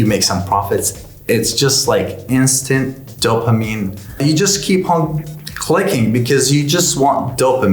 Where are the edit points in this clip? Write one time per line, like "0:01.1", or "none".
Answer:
0:04.2